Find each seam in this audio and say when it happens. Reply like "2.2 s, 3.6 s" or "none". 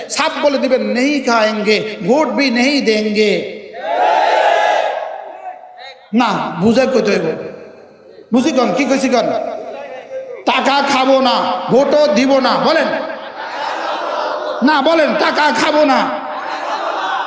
none